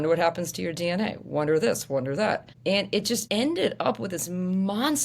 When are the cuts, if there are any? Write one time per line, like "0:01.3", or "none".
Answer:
0:03.0